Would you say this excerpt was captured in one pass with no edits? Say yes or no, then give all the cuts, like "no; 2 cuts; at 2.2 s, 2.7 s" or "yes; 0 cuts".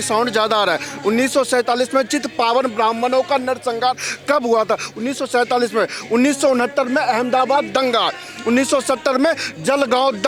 yes; 0 cuts